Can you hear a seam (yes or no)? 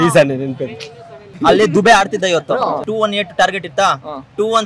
yes